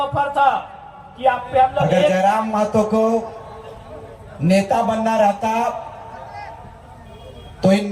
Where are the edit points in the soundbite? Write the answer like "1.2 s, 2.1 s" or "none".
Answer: 2.1 s